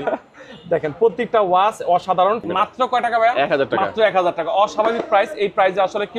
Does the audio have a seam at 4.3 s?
no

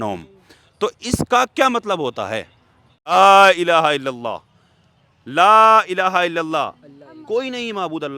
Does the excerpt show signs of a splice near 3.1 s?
yes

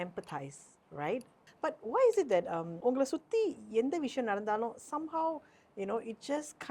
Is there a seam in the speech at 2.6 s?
yes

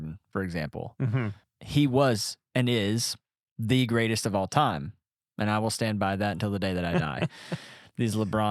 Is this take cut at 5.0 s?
no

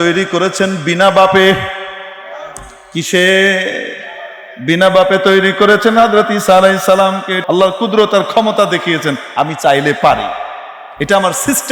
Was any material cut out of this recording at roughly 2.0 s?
no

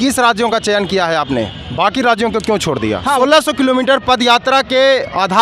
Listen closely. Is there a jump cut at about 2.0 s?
no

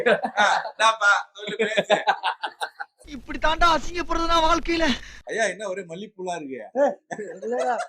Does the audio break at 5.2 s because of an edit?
yes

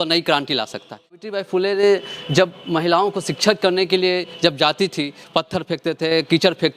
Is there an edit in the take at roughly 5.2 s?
yes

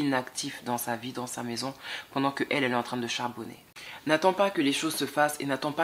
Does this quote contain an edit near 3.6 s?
yes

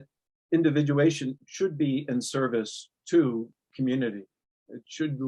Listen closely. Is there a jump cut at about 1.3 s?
yes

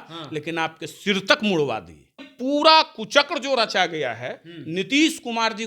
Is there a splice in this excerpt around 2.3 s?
yes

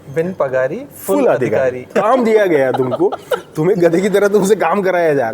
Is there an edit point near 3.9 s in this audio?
no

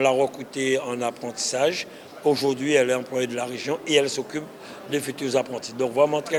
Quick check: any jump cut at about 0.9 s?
no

